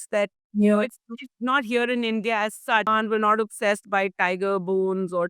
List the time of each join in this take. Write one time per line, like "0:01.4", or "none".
0:02.9